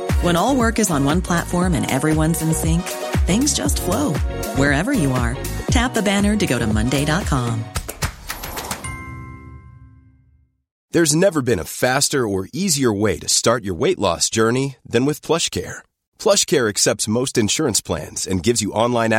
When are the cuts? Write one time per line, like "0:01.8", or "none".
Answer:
none